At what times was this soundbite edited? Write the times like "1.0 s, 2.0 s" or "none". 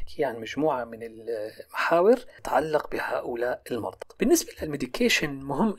4.0 s